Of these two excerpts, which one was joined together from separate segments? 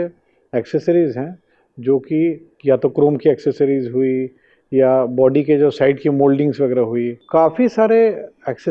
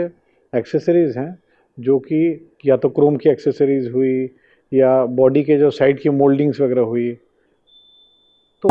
first; 1 cut; at 7.2 s

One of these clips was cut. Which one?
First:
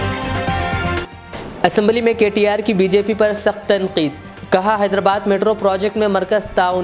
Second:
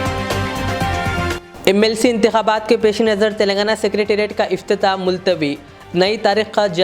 second; 1 cut; at 1.3 s

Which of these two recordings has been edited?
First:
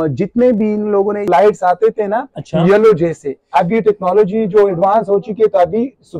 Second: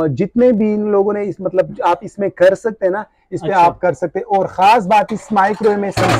first; 1 cut; at 1.3 s

